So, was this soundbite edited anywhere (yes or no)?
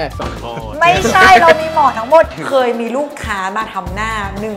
yes